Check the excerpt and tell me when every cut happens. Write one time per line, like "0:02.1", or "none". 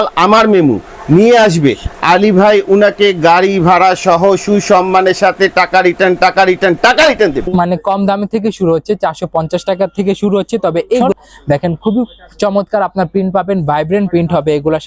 0:07.4
0:11.0